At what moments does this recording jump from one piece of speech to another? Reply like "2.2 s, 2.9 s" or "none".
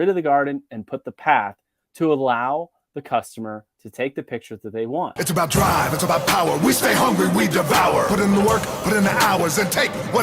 5.1 s